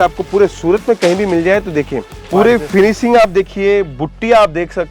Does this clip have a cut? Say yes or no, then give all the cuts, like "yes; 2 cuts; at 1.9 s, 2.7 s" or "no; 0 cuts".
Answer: yes; 1 cut; at 2.3 s